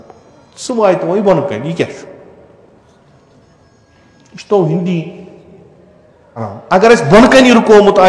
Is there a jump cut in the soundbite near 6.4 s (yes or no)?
yes